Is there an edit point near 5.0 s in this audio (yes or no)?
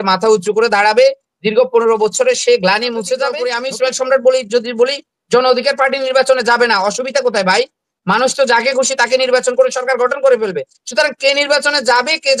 no